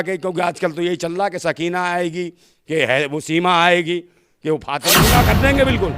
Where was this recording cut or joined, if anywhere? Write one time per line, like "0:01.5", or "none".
0:05.0